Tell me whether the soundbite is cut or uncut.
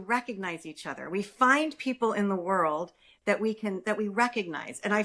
uncut